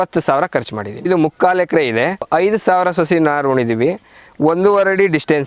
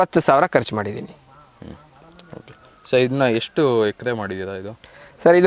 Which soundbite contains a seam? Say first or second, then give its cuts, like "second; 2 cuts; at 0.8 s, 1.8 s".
first; 2 cuts; at 1.1 s, 2.3 s